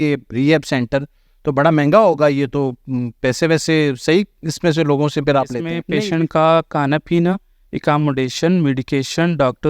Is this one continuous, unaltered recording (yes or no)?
no